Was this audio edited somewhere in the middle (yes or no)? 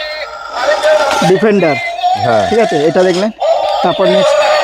no